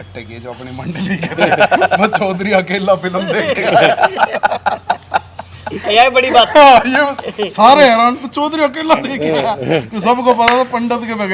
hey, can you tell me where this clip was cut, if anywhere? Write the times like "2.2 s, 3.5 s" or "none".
none